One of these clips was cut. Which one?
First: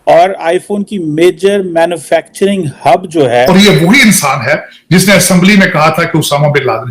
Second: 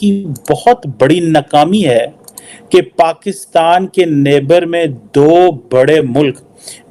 first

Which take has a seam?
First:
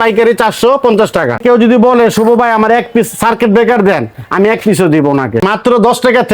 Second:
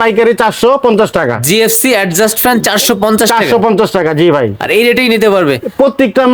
first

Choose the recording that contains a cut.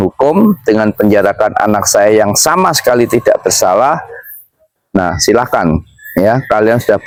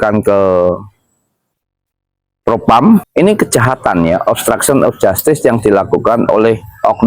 second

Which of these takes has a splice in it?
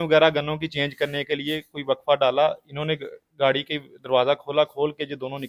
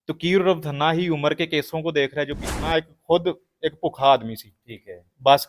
second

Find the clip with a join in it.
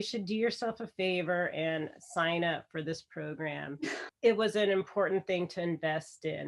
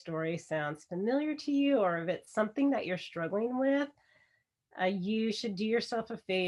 first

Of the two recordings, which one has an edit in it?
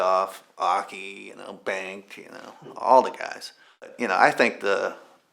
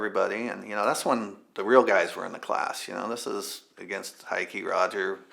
first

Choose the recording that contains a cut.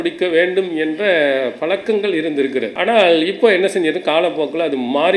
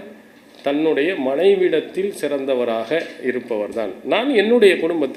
first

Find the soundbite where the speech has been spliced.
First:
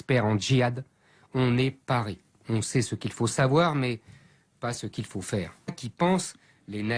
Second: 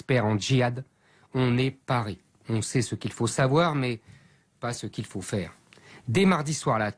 second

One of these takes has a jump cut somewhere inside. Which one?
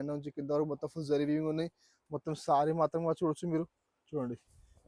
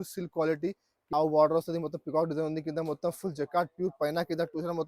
second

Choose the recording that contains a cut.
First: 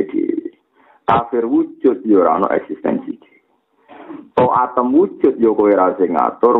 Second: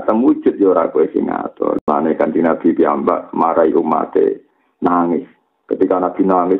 second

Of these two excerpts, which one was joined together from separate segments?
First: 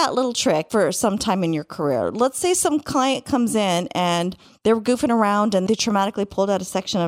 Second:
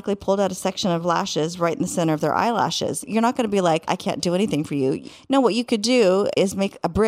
second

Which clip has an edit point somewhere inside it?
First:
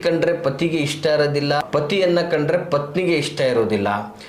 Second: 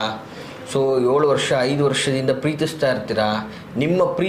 first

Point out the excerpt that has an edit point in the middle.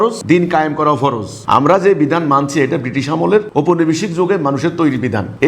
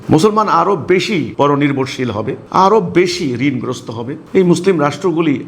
first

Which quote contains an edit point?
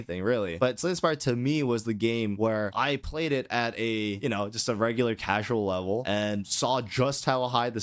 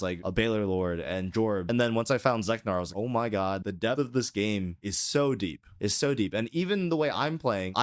second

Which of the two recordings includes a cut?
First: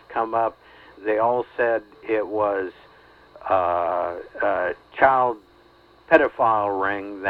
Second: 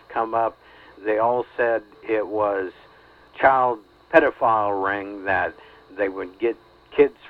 second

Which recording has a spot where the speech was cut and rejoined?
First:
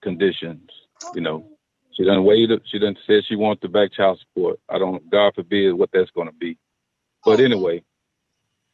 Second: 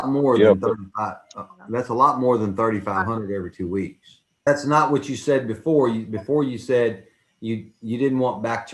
second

